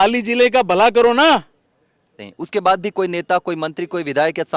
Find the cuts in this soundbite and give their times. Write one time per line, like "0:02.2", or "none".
0:02.3